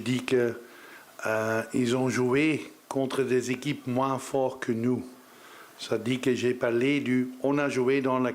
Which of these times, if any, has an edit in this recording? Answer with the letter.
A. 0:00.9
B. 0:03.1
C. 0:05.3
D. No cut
D